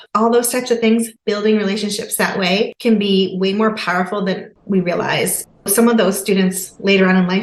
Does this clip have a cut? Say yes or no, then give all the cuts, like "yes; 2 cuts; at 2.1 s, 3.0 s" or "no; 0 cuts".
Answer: yes; 3 cuts; at 1.1 s, 2.7 s, 4.6 s